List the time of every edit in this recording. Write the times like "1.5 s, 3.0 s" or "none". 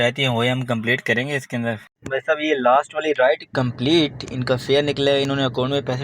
1.9 s